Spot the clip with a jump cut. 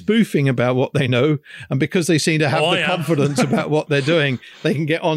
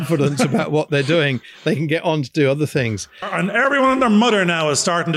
second; 1 cut; at 3.3 s

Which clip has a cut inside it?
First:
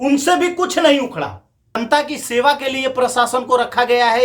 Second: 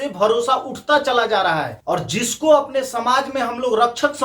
first; 1 cut; at 1.8 s

